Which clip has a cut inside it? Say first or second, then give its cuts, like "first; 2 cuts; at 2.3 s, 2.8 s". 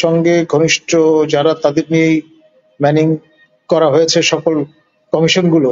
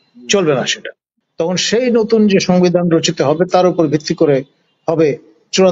second; 1 cut; at 1.1 s